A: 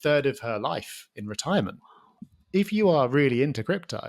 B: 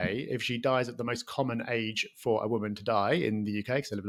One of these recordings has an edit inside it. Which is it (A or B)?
A